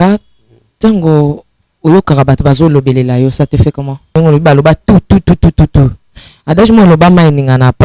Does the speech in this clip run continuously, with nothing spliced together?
no; 1 cut; at 4.1 s

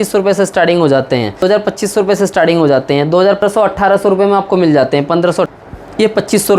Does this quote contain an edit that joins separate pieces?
yes; 3 cuts; at 1.4 s, 3.4 s, 5.5 s

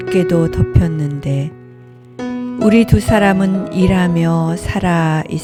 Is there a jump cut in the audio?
no; 0 cuts

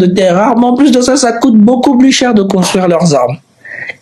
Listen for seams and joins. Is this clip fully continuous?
yes; 0 cuts

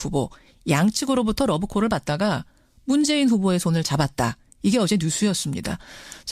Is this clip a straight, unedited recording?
yes; 0 cuts

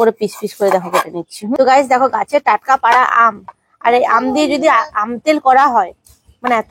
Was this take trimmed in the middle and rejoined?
yes; 1 cut; at 1.5 s

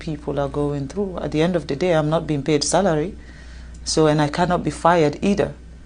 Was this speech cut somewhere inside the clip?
no; 0 cuts

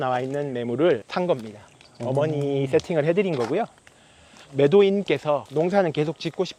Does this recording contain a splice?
no; 0 cuts

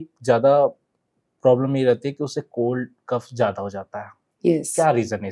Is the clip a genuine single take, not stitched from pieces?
yes; 0 cuts

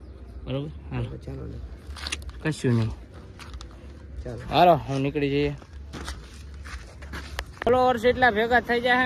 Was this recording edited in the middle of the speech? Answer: no; 0 cuts

